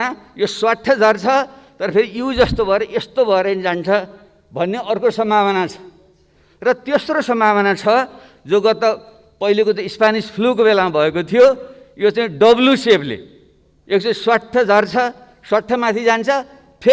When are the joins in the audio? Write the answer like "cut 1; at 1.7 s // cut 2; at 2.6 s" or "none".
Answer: none

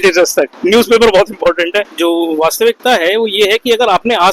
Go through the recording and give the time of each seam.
cut 1; at 1.9 s

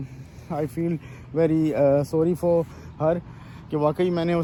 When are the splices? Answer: none

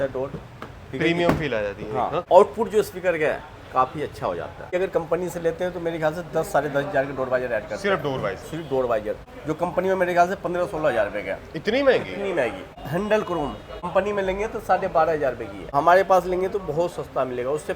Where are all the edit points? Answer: cut 1; at 2.2 s // cut 2; at 4.7 s // cut 3; at 9.2 s // cut 4; at 13.9 s // cut 5; at 15.7 s

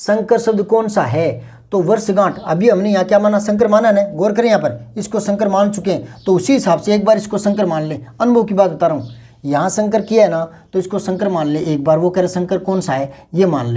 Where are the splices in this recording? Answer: none

